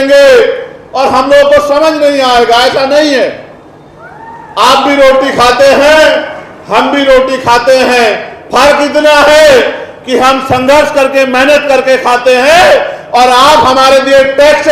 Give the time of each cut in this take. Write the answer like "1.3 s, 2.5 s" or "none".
none